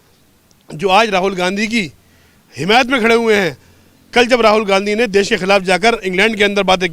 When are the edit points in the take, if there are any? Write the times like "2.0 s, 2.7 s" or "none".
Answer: none